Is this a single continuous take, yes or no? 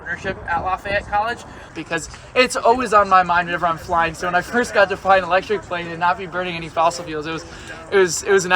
no